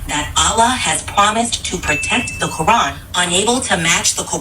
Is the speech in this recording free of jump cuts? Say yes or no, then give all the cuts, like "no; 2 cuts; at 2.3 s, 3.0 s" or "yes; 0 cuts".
no; 1 cut; at 3.0 s